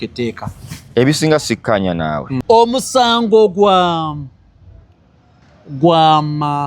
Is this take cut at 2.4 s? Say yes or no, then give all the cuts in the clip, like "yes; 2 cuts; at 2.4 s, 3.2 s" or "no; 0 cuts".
yes; 1 cut; at 2.4 s